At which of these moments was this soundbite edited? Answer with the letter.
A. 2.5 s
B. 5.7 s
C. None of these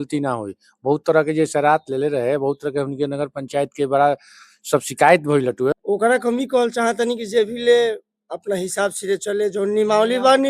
B